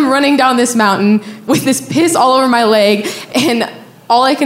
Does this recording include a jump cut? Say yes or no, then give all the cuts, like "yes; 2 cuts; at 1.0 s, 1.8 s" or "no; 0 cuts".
yes; 2 cuts; at 1.4 s, 3.1 s